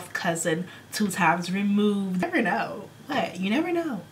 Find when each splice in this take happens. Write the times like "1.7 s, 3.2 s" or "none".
2.2 s